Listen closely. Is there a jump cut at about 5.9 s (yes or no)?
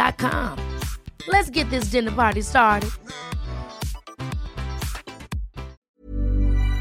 yes